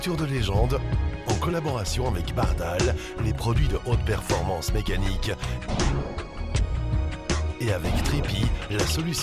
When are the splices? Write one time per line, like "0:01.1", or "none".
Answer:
none